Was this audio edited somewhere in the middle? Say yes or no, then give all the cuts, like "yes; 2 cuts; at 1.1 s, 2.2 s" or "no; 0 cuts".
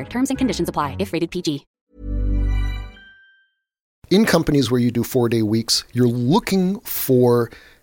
yes; 2 cuts; at 1.7 s, 4.0 s